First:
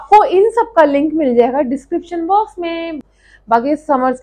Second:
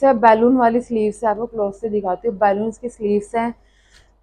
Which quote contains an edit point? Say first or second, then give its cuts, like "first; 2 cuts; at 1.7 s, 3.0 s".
first; 1 cut; at 3.1 s